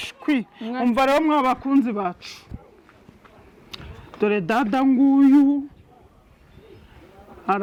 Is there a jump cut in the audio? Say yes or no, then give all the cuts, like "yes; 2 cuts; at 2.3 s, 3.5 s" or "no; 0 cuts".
no; 0 cuts